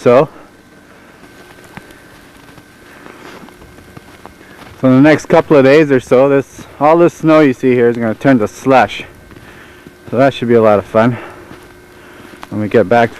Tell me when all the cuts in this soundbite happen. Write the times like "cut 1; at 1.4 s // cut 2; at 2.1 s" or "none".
cut 1; at 1.7 s

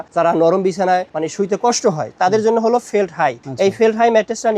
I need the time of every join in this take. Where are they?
none

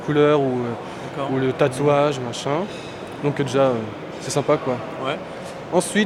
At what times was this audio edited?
none

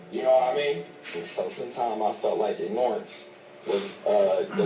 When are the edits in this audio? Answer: cut 1; at 1.1 s

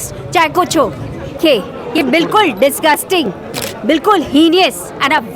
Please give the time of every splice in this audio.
cut 1; at 1.4 s

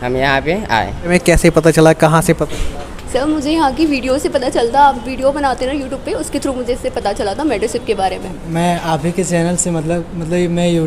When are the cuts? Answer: cut 1; at 1.1 s // cut 2; at 8.4 s

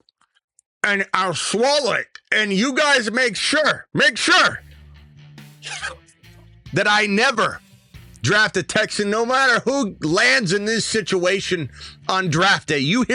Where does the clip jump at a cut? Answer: none

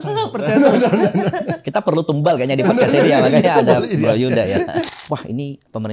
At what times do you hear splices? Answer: cut 1; at 4.9 s

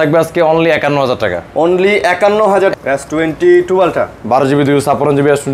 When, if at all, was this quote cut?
cut 1; at 2.7 s

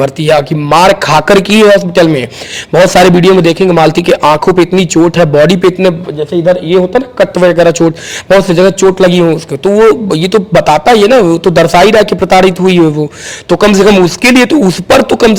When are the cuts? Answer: none

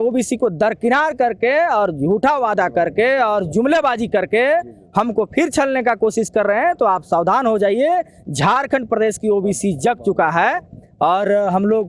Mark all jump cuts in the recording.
none

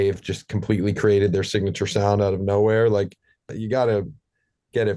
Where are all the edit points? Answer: cut 1; at 3.5 s

